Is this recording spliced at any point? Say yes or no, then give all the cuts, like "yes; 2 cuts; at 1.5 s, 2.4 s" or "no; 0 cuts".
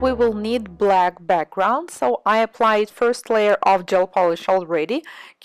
yes; 1 cut; at 1.2 s